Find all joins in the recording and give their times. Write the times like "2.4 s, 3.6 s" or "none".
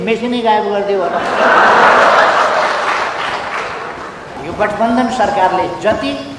4.4 s